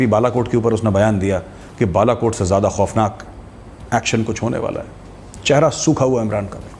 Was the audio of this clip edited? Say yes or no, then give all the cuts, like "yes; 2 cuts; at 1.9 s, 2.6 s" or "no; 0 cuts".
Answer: no; 0 cuts